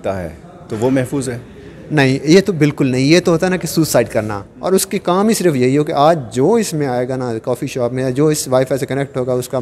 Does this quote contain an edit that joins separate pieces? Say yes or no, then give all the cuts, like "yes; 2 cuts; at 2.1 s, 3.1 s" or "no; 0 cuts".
yes; 1 cut; at 4.4 s